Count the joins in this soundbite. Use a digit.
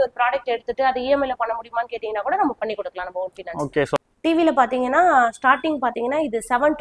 1